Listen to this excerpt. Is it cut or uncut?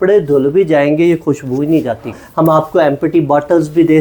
cut